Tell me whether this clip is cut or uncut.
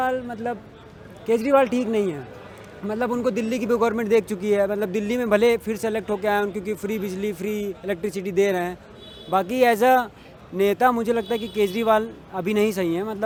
uncut